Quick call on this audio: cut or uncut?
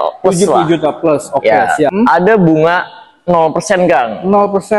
cut